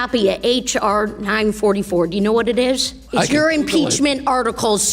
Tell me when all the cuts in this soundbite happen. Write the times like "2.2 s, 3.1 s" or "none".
2.9 s